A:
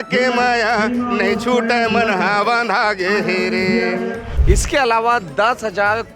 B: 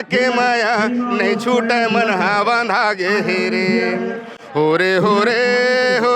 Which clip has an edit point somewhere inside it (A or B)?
A